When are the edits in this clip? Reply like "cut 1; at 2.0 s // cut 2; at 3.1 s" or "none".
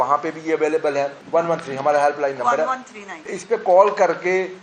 cut 1; at 1.2 s // cut 2; at 3.4 s

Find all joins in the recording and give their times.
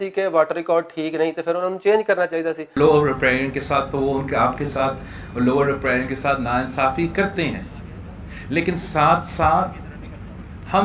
cut 1; at 2.6 s

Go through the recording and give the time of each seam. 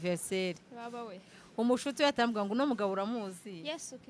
none

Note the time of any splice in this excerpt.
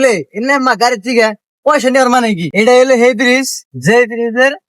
cut 1; at 2.5 s

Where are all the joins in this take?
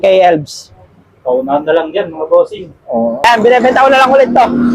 cut 1; at 3.2 s

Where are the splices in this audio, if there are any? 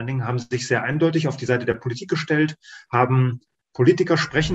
none

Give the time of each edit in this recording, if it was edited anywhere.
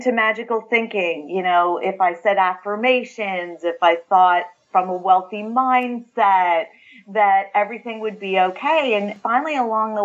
none

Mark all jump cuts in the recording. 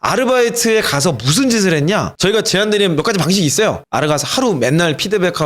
cut 1; at 2.1 s

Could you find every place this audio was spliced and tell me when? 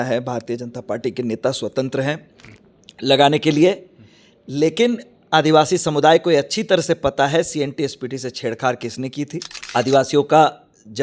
cut 1; at 9.6 s

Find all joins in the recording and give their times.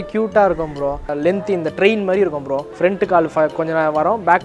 cut 1; at 1.1 s // cut 2; at 2.6 s

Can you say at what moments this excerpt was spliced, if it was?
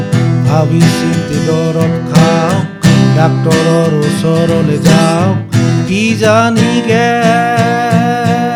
none

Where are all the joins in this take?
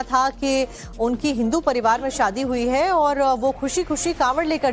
cut 1; at 1.2 s

